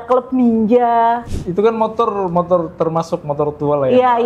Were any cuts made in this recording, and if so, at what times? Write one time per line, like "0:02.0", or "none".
0:01.3